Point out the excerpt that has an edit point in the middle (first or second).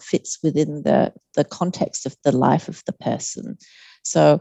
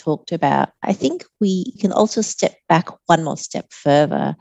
second